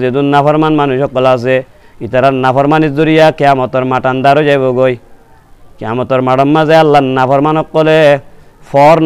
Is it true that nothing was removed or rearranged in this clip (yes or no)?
yes